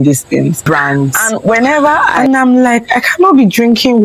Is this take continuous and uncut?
no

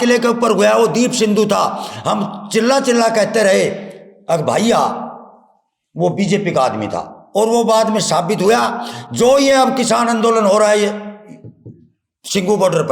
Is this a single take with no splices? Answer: yes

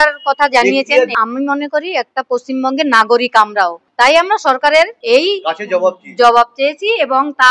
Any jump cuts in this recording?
yes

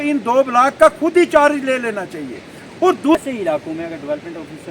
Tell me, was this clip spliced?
yes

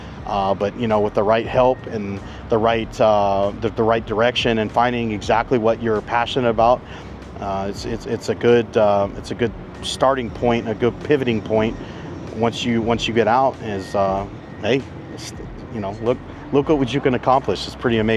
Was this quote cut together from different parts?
no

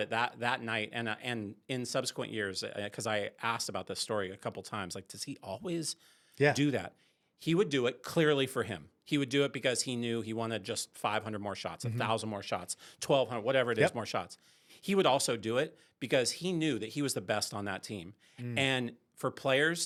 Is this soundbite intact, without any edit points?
yes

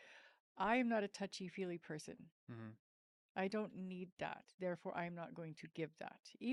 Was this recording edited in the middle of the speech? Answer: no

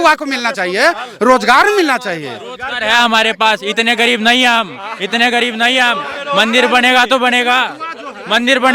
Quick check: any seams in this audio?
no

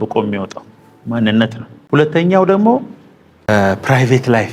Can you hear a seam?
yes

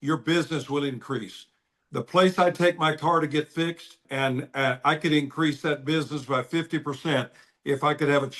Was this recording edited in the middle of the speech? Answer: yes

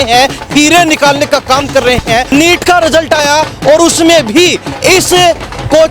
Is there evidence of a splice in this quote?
yes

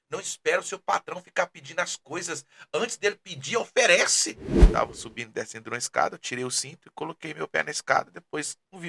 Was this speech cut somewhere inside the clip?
yes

